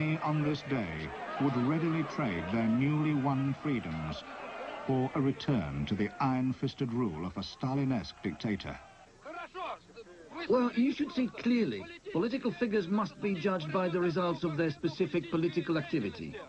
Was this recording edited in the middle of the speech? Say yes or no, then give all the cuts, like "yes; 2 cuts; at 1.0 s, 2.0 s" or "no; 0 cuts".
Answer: yes; 1 cut; at 2.5 s